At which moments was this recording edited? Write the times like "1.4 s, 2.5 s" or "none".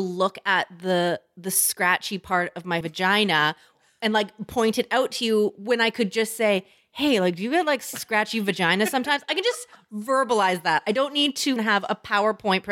2.8 s, 11.6 s